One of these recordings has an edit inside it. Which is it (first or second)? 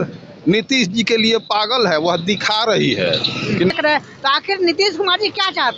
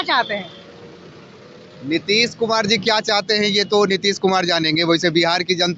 first